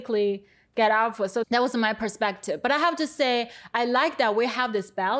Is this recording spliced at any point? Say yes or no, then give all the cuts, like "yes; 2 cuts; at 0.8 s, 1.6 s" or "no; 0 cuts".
no; 0 cuts